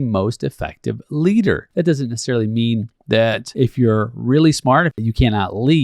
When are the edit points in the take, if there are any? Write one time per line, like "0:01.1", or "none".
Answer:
0:01.7
0:03.4
0:05.0